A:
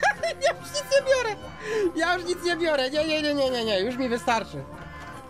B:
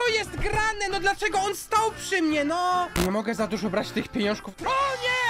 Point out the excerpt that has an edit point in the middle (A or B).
B